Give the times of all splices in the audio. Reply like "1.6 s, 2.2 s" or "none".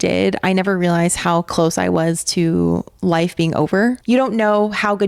4.0 s